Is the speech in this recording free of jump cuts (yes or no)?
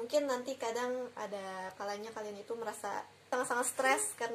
no